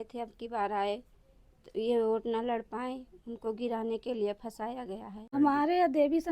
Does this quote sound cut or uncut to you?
cut